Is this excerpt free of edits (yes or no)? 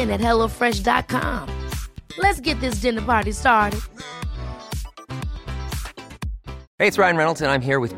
no